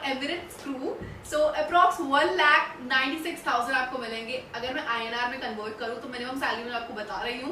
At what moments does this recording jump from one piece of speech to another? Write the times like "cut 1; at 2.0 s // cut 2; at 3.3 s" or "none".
none